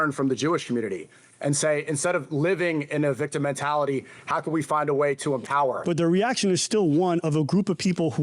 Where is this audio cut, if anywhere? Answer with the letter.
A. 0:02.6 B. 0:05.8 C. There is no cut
B